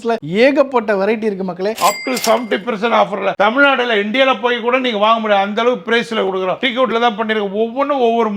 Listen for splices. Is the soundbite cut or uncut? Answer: cut